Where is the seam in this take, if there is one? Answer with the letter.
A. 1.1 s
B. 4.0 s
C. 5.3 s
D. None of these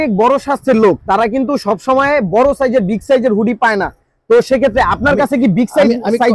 D